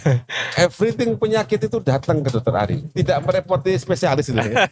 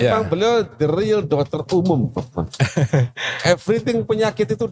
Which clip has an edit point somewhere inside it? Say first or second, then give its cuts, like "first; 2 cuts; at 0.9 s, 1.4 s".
first; 1 cut; at 2.8 s